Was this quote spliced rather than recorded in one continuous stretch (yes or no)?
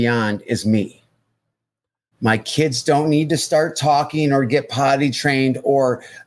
no